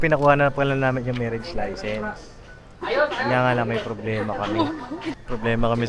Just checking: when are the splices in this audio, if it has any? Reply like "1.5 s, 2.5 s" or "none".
5.0 s